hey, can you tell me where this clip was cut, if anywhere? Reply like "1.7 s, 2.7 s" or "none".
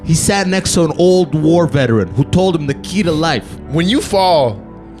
3.5 s

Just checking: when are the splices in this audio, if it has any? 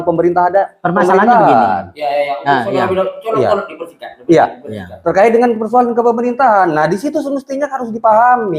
none

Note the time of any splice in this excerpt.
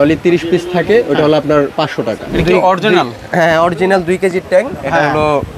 2.2 s

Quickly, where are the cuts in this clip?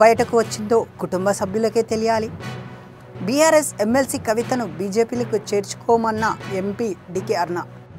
none

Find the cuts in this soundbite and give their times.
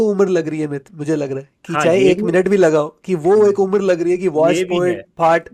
none

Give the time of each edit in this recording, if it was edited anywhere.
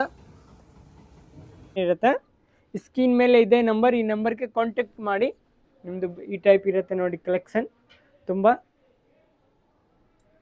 1.8 s

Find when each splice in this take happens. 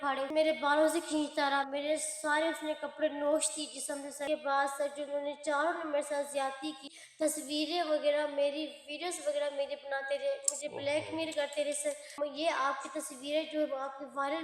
6.8 s, 12.2 s

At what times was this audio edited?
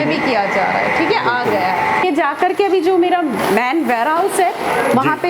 2.0 s

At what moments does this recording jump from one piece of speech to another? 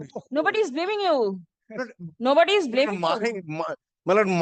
none

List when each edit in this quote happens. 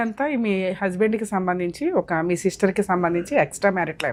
none

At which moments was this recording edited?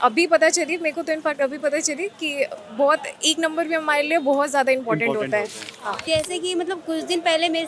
6.0 s

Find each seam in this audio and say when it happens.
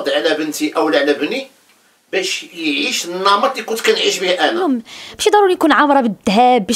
4.7 s

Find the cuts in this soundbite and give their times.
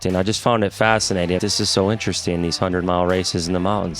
1.4 s

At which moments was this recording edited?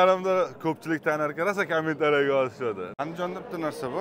2.9 s

